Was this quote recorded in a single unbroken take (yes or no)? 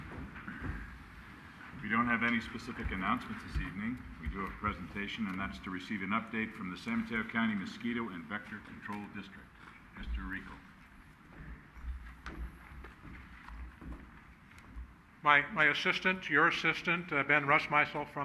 no